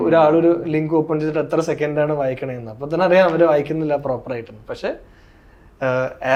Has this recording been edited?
no; 0 cuts

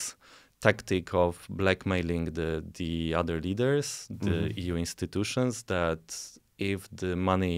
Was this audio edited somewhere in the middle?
no; 0 cuts

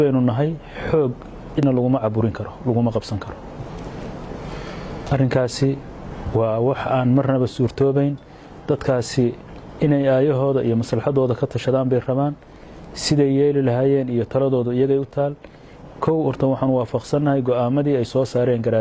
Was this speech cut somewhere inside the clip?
yes; 1 cut; at 1.5 s

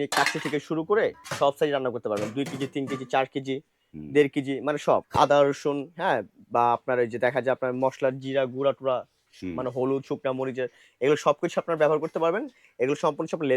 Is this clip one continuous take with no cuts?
no; 2 cuts; at 1.2 s, 5.1 s

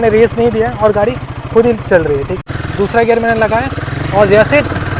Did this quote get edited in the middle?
yes; 1 cut; at 2.5 s

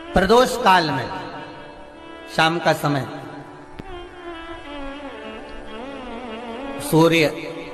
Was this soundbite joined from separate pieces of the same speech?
no; 0 cuts

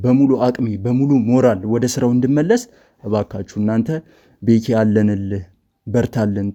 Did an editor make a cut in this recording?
no; 0 cuts

